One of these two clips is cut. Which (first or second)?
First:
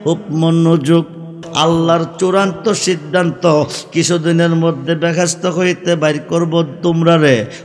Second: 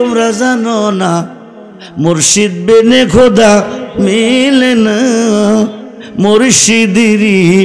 first